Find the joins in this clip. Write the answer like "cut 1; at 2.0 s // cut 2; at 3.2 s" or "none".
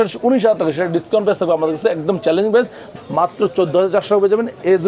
cut 1; at 2.9 s